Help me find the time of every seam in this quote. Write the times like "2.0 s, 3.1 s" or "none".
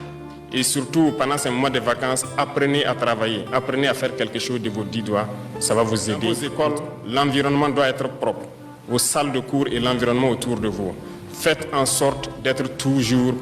6.4 s